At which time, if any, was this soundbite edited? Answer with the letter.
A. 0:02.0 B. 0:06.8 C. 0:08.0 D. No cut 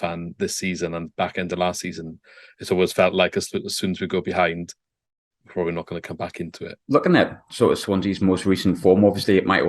B